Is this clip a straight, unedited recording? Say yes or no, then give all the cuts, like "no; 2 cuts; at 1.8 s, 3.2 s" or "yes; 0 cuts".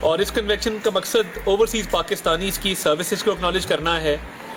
yes; 0 cuts